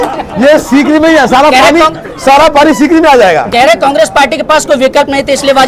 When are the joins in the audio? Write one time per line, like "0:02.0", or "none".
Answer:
none

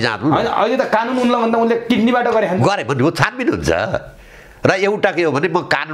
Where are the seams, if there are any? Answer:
none

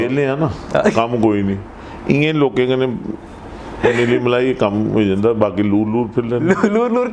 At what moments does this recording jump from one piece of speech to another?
none

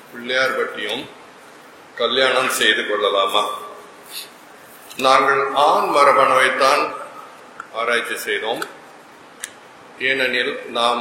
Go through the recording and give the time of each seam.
none

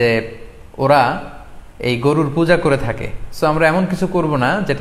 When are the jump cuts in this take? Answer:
none

